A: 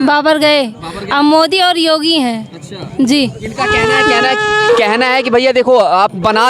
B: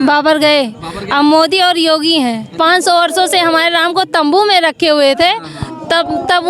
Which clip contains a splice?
B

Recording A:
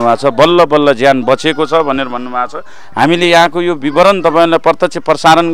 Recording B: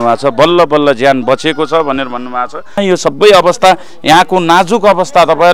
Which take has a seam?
B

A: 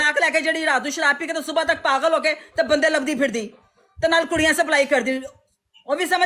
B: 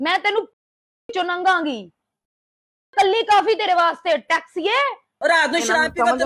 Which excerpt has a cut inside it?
B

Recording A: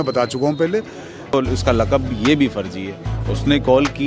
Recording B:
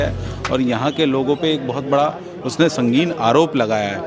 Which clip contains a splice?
A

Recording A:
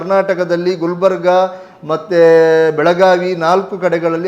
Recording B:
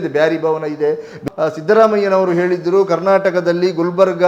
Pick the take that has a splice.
B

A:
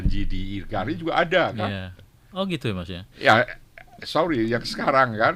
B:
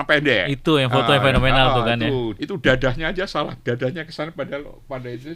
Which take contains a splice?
B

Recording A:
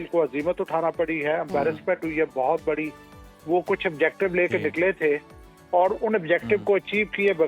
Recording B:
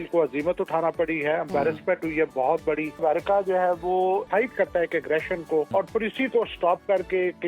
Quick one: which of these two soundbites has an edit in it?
B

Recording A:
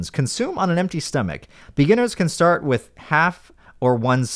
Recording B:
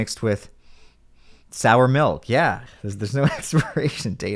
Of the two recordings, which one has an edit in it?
B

